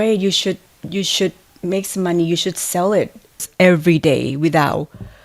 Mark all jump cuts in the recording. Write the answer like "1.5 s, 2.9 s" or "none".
3.5 s